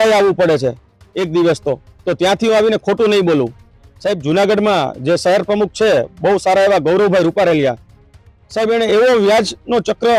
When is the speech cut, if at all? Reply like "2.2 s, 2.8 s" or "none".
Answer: none

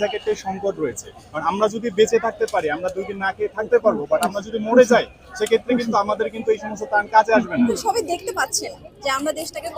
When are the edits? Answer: 7.8 s

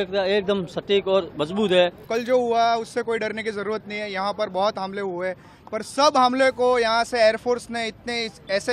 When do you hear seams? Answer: 2.0 s

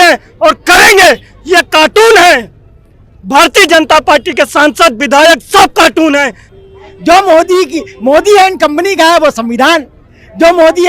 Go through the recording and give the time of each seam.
6.4 s

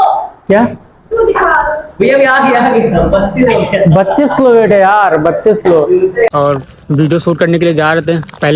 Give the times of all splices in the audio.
6.3 s

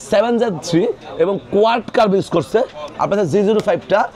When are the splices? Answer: 2.9 s

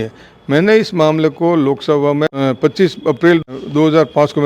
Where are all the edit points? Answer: 2.3 s, 3.5 s

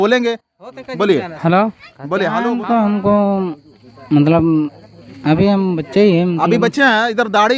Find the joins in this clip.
2.4 s

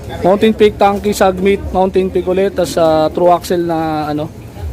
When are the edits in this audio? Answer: none

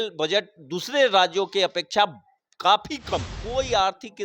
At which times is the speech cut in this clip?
3.4 s

